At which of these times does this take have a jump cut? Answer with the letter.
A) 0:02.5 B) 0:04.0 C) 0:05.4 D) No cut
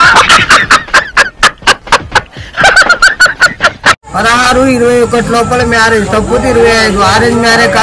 B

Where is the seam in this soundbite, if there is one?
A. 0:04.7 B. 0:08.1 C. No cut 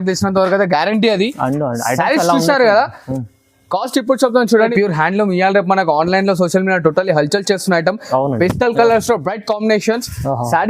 A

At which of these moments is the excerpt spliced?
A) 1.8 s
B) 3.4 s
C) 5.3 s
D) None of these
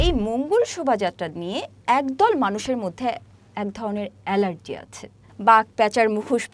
C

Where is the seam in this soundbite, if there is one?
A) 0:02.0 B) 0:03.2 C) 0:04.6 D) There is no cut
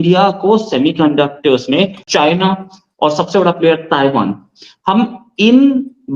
A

